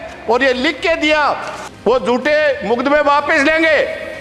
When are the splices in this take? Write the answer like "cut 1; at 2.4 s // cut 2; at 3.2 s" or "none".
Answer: cut 1; at 1.5 s